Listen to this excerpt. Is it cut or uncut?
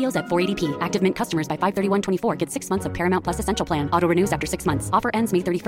uncut